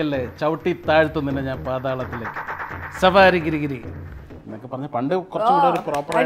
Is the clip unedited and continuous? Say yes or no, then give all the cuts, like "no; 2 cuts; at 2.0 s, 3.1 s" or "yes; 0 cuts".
yes; 0 cuts